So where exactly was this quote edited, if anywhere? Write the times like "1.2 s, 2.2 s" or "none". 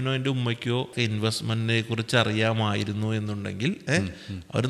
0.9 s